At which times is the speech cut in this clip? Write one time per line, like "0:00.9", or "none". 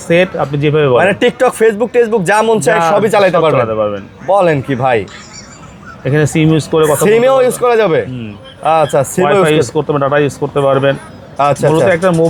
none